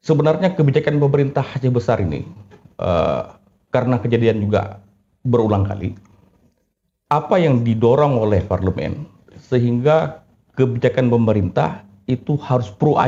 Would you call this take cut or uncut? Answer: uncut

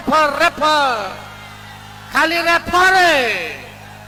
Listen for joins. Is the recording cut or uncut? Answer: uncut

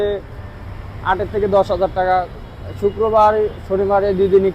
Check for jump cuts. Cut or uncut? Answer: uncut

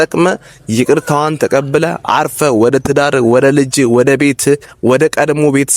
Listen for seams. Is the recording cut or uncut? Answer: uncut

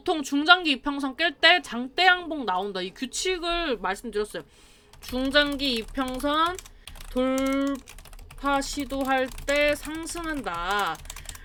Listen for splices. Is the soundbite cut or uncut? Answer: uncut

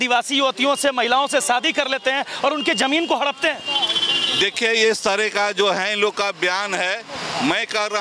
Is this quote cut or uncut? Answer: uncut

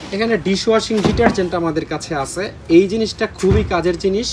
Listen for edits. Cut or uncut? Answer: uncut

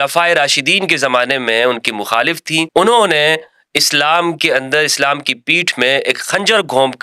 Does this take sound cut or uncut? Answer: cut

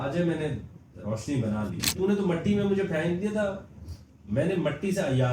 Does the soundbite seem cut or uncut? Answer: cut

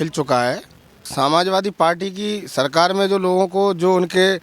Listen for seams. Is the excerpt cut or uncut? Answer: cut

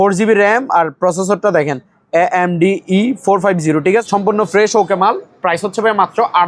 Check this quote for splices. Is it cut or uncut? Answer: cut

